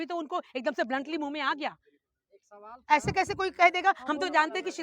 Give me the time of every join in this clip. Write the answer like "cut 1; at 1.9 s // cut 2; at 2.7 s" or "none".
none